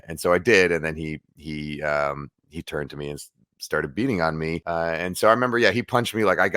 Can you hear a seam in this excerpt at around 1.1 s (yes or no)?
no